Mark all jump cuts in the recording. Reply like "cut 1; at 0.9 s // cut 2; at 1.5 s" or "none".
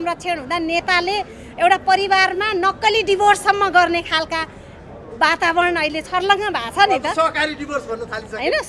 none